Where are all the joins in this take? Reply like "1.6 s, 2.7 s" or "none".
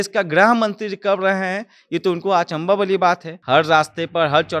3.3 s